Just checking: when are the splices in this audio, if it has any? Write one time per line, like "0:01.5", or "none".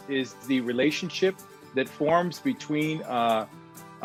none